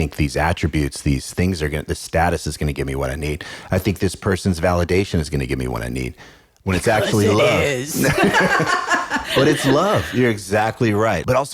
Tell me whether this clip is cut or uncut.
uncut